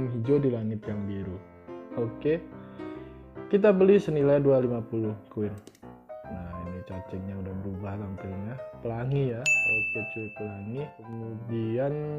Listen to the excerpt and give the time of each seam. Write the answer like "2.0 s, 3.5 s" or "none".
11.1 s